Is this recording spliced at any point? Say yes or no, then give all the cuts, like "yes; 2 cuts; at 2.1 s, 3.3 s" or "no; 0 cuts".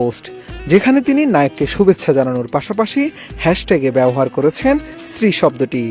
no; 0 cuts